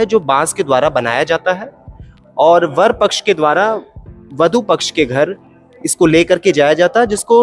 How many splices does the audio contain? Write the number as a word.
zero